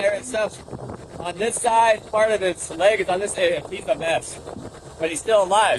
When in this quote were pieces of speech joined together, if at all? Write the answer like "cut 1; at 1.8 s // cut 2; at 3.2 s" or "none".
none